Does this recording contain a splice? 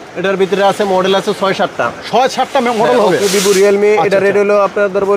no; 0 cuts

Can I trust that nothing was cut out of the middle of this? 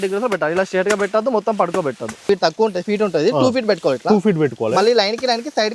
no; 1 cut; at 2.3 s

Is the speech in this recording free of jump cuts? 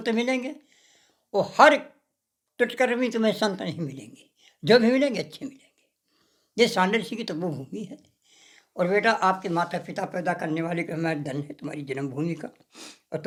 yes; 0 cuts

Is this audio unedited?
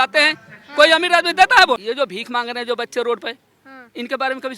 no; 1 cut; at 1.9 s

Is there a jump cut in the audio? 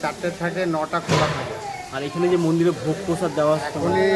no; 0 cuts

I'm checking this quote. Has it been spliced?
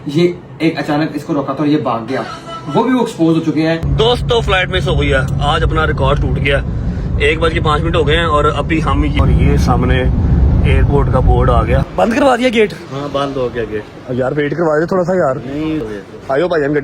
yes; 4 cuts; at 3.9 s, 9.2 s, 12.0 s, 15.8 s

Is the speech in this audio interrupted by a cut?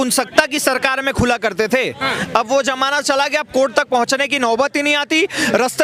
no; 0 cuts

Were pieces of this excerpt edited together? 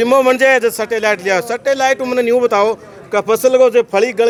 no; 0 cuts

